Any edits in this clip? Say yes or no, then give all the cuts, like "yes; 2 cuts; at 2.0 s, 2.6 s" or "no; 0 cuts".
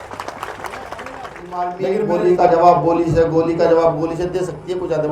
yes; 1 cut; at 1.7 s